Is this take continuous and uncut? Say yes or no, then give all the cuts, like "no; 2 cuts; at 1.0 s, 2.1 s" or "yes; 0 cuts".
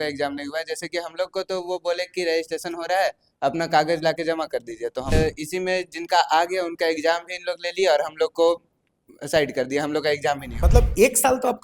no; 2 cuts; at 5.1 s, 10.5 s